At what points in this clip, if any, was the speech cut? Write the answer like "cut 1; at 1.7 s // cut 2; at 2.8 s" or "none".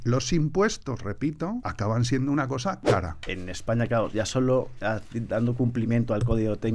cut 1; at 1.7 s // cut 2; at 3.2 s